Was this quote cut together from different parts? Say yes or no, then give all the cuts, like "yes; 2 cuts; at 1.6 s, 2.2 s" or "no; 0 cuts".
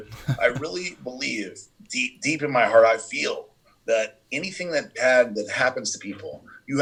no; 0 cuts